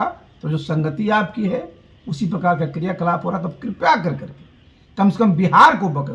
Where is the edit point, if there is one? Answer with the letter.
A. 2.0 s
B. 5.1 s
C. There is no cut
C